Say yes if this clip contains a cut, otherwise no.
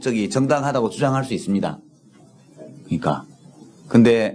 no